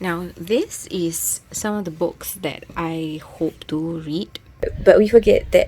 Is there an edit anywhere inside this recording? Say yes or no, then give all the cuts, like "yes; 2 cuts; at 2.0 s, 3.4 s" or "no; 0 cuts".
yes; 1 cut; at 4.7 s